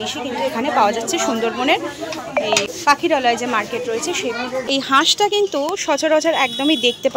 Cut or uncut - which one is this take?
cut